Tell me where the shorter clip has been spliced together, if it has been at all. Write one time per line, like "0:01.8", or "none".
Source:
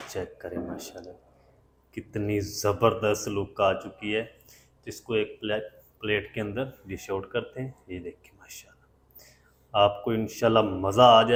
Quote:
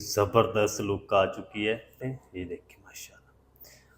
0:02.0